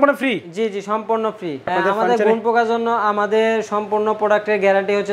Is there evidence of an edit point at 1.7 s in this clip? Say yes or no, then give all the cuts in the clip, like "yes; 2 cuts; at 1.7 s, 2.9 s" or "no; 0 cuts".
yes; 1 cut; at 1.7 s